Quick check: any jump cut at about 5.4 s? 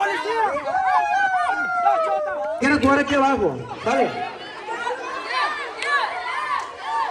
no; 1 cut; at 2.6 s

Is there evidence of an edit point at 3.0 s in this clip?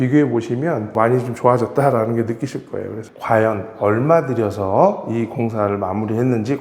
yes; 1 cut; at 3.0 s

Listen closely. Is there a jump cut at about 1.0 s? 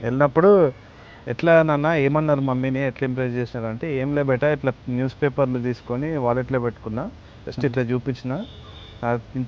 no; 0 cuts

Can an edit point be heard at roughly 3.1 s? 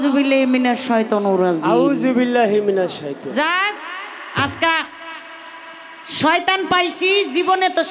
yes; 1 cut; at 3.1 s

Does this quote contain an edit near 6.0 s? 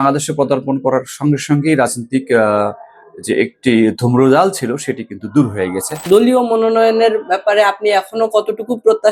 yes; 1 cut; at 6.0 s

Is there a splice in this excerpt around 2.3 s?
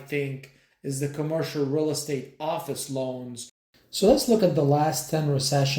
no; 1 cut; at 3.5 s

